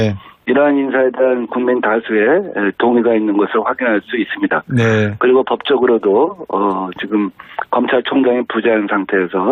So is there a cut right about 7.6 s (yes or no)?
no